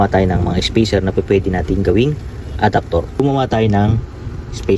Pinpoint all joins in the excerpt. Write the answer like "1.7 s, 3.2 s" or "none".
3.1 s